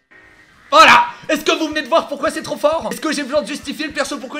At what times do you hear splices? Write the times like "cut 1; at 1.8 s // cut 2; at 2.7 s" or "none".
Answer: cut 1; at 3.0 s